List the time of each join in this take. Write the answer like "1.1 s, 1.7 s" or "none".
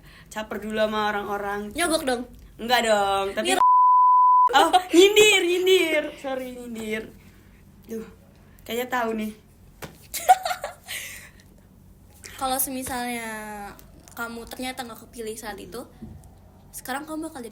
none